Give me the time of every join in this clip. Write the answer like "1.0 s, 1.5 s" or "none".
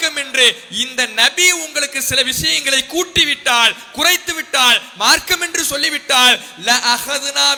none